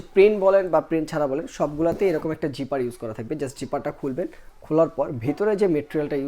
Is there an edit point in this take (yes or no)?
no